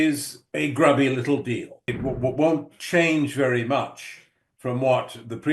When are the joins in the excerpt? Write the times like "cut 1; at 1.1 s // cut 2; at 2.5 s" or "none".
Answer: cut 1; at 1.9 s